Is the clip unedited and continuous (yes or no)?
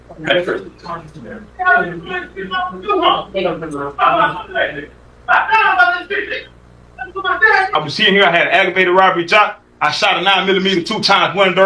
no